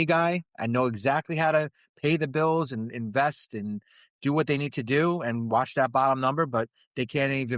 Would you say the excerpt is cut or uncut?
uncut